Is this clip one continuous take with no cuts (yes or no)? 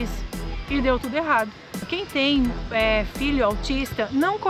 no